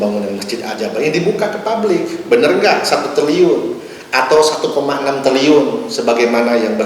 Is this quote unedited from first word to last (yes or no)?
yes